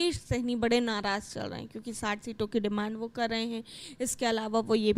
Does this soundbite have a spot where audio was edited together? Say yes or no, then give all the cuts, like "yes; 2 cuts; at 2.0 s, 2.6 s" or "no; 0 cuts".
no; 0 cuts